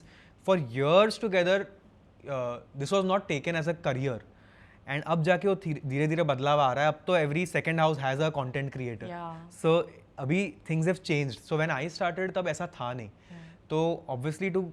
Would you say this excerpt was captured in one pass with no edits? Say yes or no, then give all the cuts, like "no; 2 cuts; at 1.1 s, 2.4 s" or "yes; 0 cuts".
yes; 0 cuts